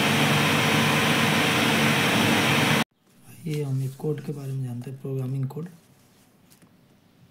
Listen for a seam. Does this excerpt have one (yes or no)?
yes